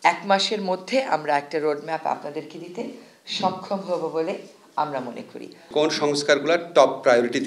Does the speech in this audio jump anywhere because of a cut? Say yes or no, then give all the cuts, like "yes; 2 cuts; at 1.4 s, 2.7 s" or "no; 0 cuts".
yes; 1 cut; at 5.6 s